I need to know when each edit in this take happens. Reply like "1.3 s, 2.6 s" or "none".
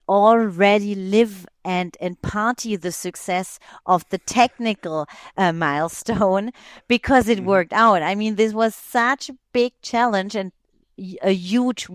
none

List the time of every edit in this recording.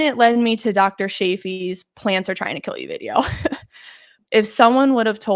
4.1 s

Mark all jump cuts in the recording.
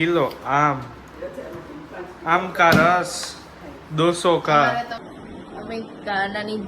4.9 s

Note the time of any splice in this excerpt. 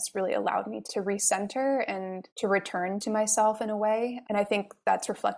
none

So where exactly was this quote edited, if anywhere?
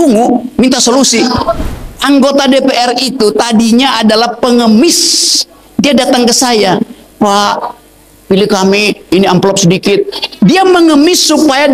1.7 s

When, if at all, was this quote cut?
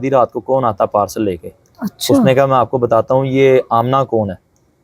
none

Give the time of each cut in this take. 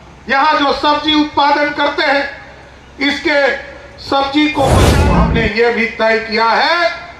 4.9 s

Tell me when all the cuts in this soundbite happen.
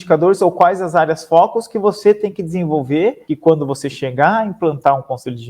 3.3 s

